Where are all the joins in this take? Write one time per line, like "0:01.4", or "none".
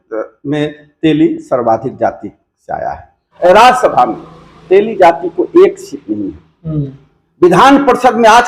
0:03.3